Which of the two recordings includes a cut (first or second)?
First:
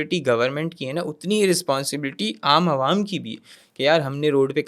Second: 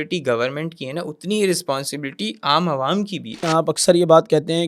second